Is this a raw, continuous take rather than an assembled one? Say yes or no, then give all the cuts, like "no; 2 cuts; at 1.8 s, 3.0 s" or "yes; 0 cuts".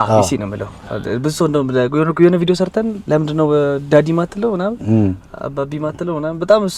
yes; 0 cuts